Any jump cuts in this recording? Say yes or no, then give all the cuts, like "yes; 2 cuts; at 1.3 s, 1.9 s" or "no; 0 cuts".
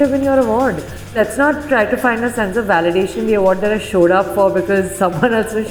yes; 1 cut; at 1.2 s